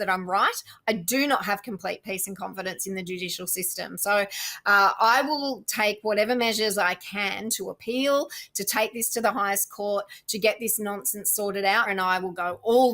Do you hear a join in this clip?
yes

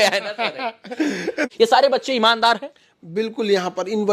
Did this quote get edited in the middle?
yes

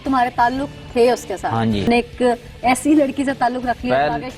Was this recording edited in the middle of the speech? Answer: yes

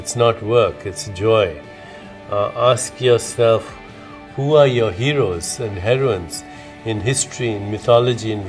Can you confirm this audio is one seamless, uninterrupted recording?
no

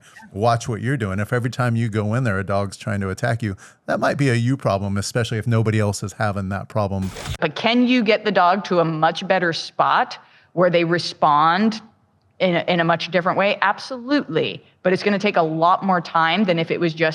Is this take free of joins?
no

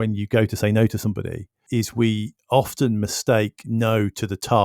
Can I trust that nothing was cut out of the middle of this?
no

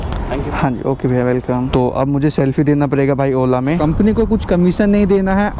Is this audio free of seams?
no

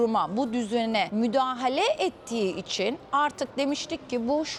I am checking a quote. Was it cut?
no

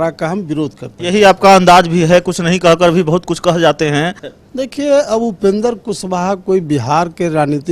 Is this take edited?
yes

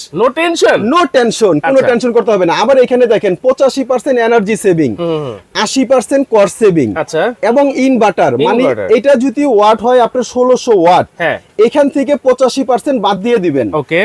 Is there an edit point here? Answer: no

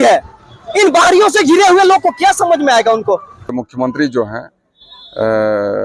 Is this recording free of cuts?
no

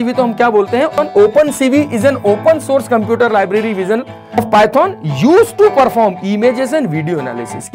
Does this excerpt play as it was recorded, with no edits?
no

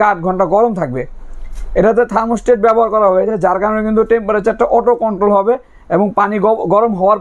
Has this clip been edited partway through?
no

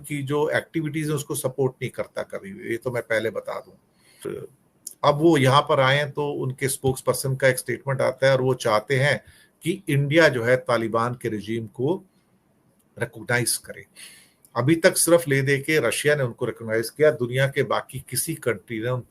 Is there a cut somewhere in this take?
yes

